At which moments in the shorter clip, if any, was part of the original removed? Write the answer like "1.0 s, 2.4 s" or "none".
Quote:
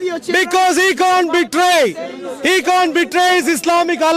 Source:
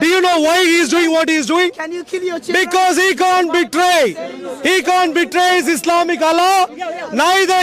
none